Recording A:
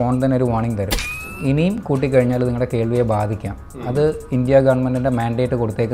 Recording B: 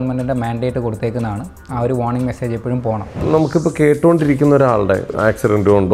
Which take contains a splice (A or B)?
B